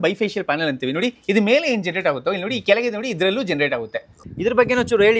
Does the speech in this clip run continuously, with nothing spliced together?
no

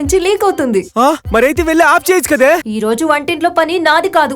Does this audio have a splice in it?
yes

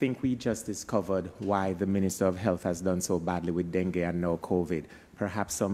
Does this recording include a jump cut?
no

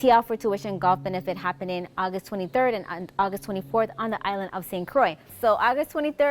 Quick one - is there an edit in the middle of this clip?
yes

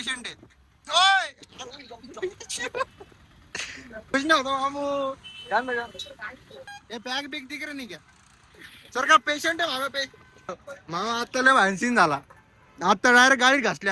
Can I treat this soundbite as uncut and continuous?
no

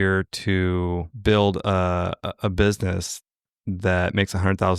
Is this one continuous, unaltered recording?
no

